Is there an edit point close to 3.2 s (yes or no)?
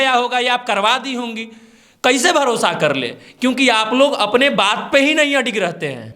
no